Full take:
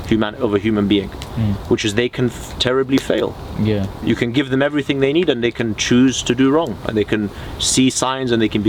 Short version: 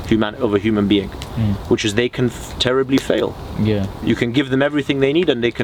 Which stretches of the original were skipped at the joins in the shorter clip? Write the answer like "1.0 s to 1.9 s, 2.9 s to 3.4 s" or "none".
none